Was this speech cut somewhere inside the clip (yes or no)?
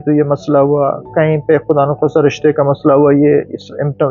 no